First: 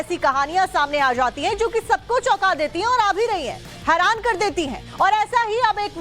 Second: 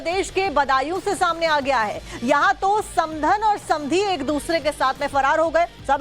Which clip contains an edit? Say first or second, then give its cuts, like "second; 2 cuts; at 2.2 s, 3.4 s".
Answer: first; 1 cut; at 1.2 s